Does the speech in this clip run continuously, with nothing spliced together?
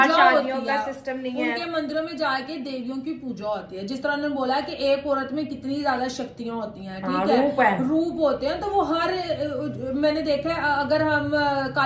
yes; 0 cuts

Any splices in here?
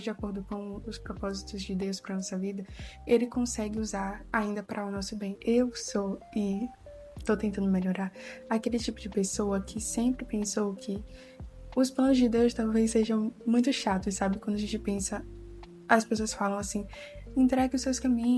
yes; 1 cut; at 5.4 s

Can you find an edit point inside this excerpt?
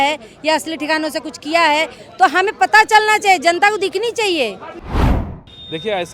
yes; 1 cut; at 5.0 s

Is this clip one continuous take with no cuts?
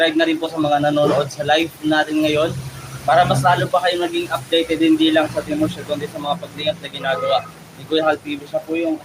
yes; 0 cuts

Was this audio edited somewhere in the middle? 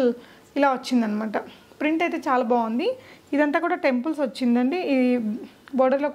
no; 0 cuts

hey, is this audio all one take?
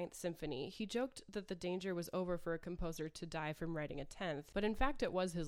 no; 1 cut; at 4.4 s

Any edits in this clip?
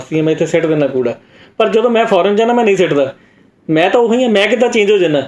no; 0 cuts

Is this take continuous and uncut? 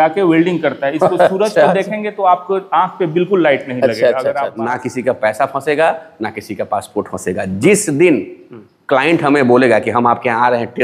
no; 1 cut; at 4.6 s

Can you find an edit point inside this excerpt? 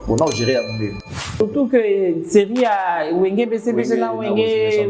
yes; 1 cut; at 1.1 s

